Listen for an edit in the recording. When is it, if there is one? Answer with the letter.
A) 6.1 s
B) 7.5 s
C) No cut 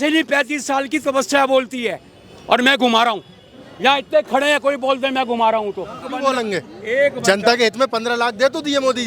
A